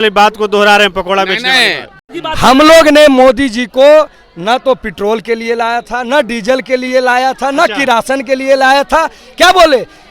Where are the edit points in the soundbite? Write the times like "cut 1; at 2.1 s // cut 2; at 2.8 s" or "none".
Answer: cut 1; at 2.1 s